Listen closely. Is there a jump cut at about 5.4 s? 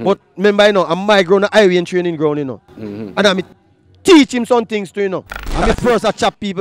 yes; 1 cut; at 5.4 s

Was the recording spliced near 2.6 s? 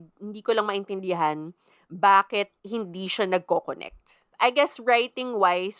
yes; 2 cuts; at 2.6 s, 4.3 s

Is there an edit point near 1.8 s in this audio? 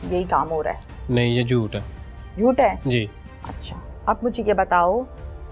no; 0 cuts

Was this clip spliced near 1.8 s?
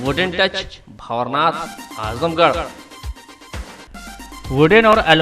no; 1 cut; at 3.8 s

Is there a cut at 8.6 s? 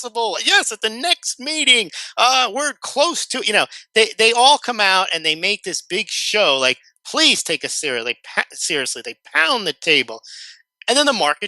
no; 1 cut; at 4.9 s

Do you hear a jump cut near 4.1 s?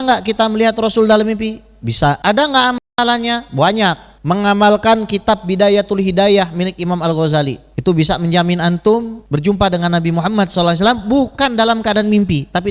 yes; 4 cuts; at 2.2 s, 4.1 s, 7.7 s, 9.2 s

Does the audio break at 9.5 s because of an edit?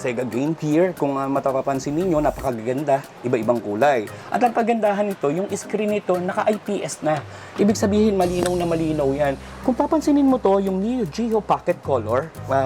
yes; 2 cuts; at 4.2 s, 9.5 s

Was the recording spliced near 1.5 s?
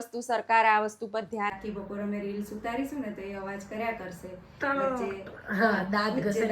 yes; 1 cut; at 1.5 s

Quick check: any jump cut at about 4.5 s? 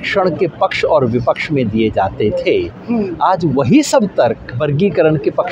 yes; 1 cut; at 4.5 s

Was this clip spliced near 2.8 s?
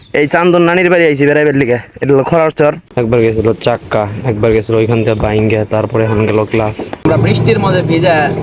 yes; 2 cuts; at 2.8 s, 7.0 s

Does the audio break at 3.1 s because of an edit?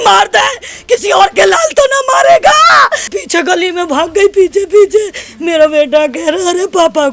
yes; 1 cut; at 3.1 s

